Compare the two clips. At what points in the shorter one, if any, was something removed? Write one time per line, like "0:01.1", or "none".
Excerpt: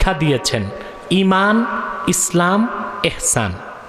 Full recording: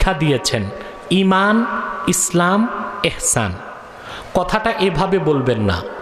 none

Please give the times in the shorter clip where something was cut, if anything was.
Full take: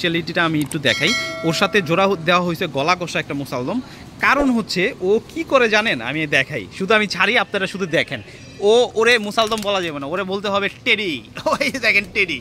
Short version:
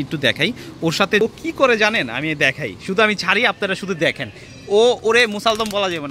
0:01.2

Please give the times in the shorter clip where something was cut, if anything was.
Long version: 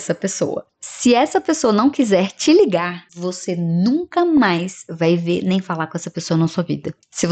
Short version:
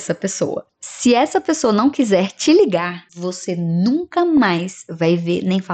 none

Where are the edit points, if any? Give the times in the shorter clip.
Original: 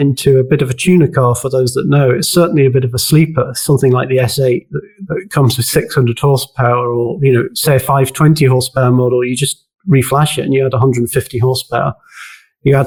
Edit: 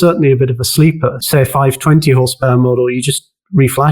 0:01.2

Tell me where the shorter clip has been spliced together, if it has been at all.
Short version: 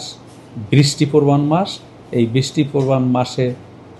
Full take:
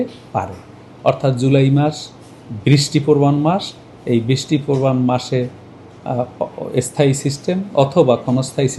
none

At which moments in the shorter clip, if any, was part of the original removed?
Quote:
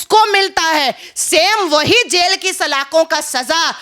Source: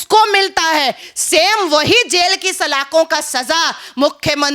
none

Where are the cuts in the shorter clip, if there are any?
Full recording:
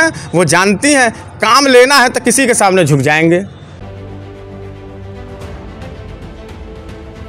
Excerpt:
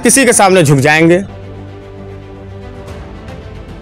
0:01.3

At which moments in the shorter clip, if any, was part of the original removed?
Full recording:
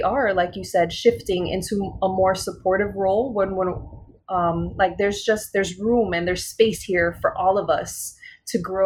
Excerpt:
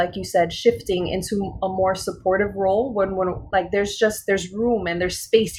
0:03.4

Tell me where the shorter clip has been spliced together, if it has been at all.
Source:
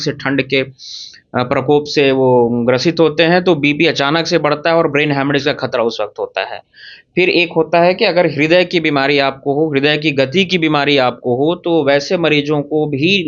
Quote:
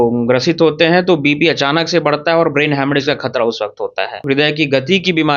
0:04.2

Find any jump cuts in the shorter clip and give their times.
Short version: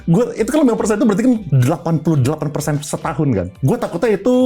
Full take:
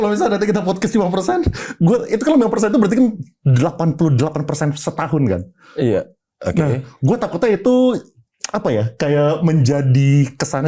0:01.5
0:03.5

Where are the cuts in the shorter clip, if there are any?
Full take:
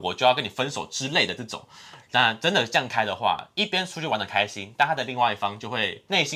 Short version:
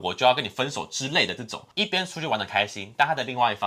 0:01.7

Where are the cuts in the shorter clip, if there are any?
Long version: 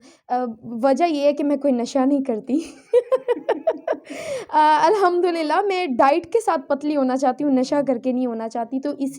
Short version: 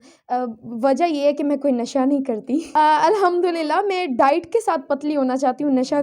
0:02.7

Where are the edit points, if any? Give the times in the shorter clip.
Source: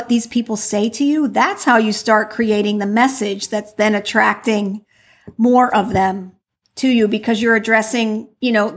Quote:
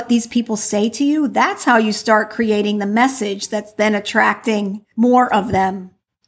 0:04.8

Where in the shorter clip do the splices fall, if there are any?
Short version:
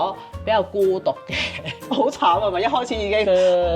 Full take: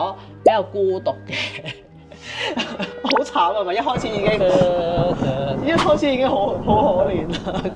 0:01.8

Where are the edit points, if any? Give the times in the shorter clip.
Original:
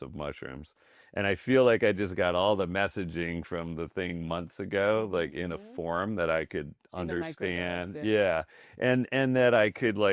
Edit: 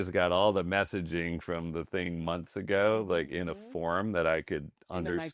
none

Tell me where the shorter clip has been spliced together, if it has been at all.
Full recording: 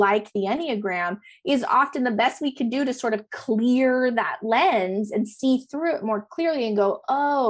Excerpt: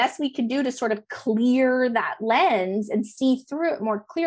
none

